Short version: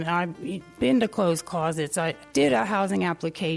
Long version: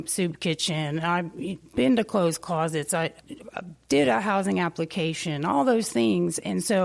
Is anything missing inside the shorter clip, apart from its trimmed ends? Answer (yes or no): yes